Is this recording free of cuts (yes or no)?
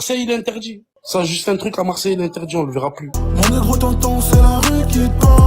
no